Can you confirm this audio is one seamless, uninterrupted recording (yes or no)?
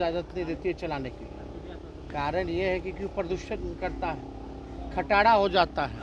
yes